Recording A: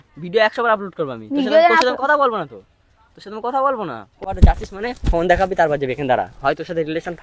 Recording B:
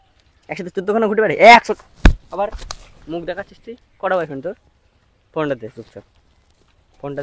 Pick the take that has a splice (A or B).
A